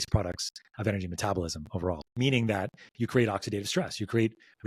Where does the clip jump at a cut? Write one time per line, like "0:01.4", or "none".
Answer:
0:02.1